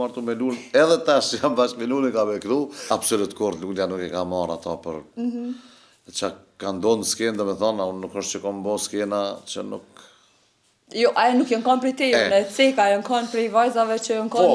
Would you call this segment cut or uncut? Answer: cut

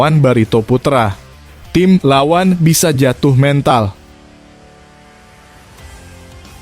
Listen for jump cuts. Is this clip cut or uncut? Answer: cut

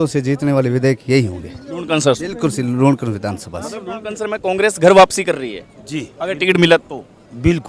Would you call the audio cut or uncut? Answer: uncut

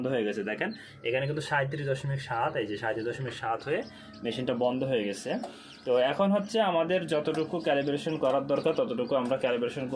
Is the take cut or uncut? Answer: uncut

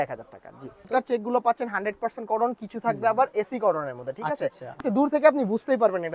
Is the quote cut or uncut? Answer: cut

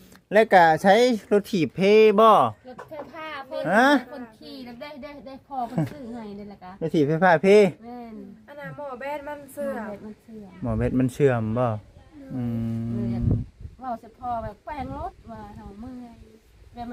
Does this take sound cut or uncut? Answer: uncut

